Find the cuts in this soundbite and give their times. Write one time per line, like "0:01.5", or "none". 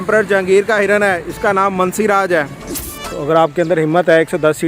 0:02.8